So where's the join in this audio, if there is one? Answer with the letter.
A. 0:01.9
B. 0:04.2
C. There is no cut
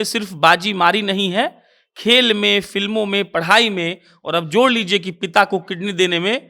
C